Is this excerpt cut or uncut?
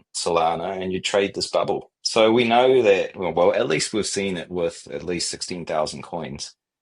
cut